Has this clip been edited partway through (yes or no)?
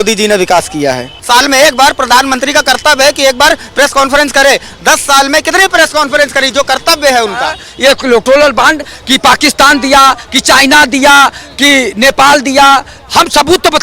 yes